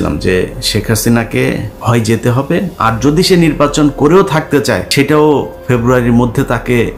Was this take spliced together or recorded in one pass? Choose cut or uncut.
cut